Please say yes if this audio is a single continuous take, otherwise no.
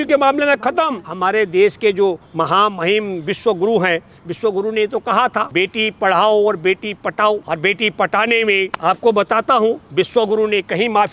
no